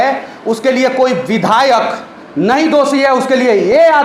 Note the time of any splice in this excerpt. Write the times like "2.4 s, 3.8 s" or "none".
none